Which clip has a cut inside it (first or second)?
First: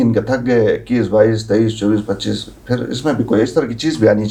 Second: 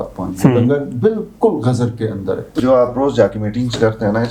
second